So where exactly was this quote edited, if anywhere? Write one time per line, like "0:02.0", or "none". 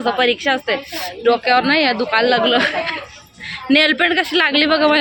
none